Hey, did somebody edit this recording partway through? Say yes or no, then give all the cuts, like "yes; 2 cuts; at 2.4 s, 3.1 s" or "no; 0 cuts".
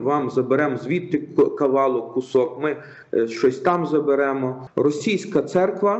yes; 1 cut; at 4.6 s